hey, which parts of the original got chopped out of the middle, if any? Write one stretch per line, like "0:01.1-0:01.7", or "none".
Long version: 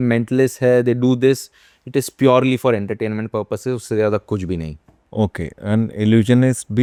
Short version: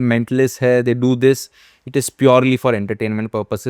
none